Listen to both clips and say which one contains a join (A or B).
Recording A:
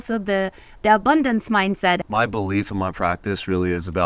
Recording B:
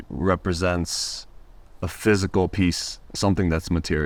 A